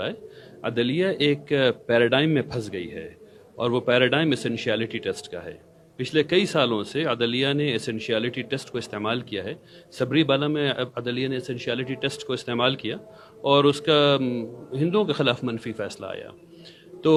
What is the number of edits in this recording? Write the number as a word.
zero